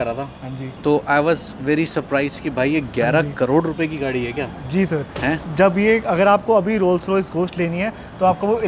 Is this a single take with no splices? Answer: yes; 0 cuts

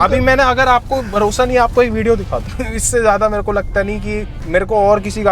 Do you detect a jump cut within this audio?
yes; 2 cuts; at 2.4 s, 4.3 s

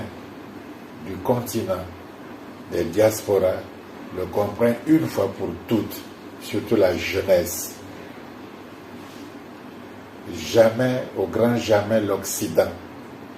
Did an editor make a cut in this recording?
no; 0 cuts

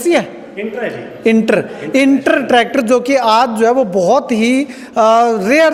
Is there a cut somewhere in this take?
no; 0 cuts

